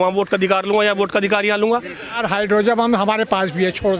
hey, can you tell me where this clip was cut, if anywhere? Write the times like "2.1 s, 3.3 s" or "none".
2.1 s